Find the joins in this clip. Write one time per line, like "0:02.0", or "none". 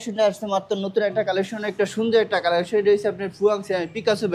none